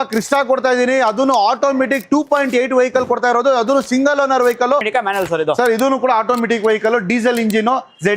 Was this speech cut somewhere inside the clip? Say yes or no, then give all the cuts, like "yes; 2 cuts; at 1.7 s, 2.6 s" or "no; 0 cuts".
yes; 1 cut; at 4.9 s